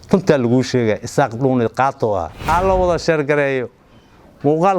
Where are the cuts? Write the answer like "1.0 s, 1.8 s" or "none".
2.4 s